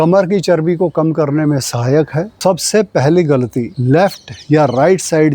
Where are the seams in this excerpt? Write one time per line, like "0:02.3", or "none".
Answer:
0:02.4
0:03.7